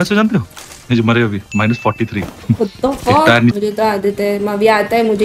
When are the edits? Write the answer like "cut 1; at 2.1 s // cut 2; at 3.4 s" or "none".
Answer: cut 1; at 3.6 s